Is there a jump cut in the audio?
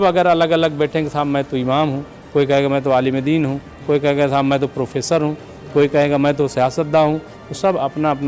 no; 0 cuts

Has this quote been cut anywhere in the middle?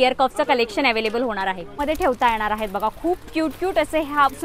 yes; 1 cut; at 1.8 s

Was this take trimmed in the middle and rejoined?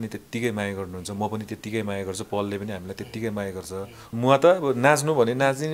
yes; 1 cut; at 4.1 s

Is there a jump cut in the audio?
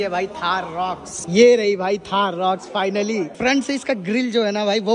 yes; 2 cuts; at 1.1 s, 3.3 s

